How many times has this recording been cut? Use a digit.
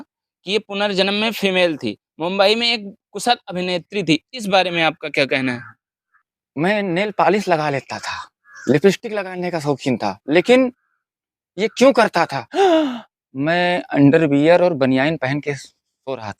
2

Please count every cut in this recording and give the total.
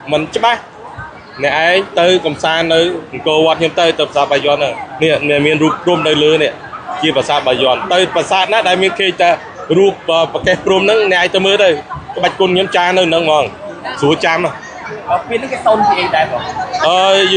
0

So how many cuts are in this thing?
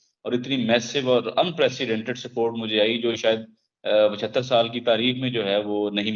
0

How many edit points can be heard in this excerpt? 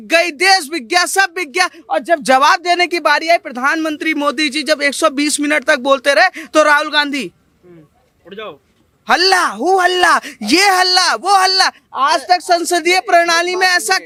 0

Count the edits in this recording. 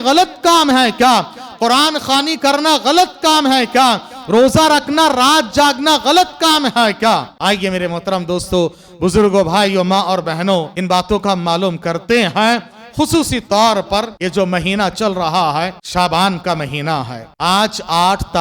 5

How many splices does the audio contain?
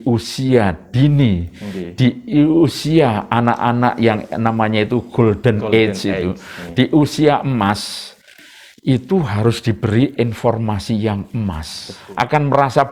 1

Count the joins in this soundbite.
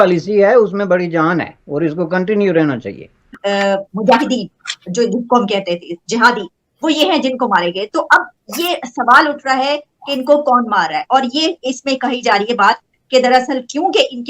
1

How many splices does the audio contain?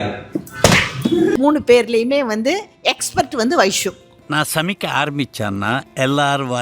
1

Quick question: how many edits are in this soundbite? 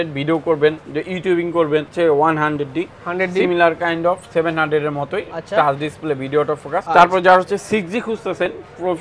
2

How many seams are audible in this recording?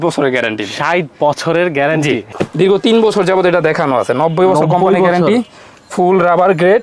1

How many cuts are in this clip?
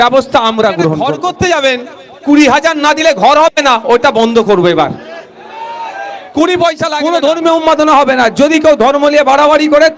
2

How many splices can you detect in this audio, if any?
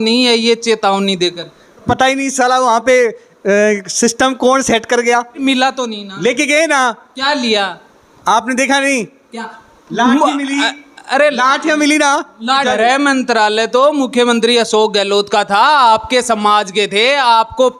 3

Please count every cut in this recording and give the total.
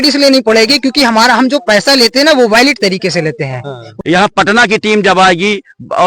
1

